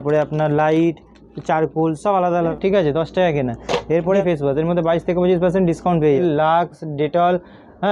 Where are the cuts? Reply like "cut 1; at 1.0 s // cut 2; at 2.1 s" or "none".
cut 1; at 2.5 s // cut 2; at 4.2 s // cut 3; at 6.2 s